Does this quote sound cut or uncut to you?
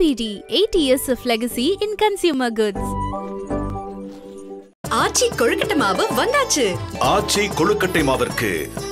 uncut